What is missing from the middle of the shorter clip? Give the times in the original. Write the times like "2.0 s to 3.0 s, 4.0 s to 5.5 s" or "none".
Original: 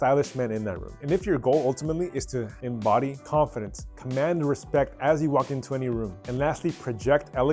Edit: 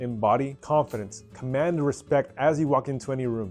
none